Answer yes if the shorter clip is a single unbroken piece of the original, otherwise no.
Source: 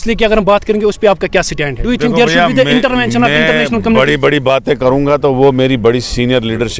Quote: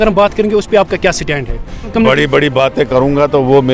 no